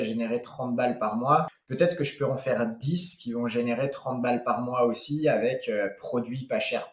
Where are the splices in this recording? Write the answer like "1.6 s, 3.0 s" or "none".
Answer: 1.6 s